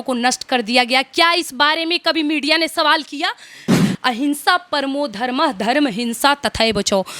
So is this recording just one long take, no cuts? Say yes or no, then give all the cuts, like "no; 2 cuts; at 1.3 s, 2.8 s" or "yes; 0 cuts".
no; 1 cut; at 3.9 s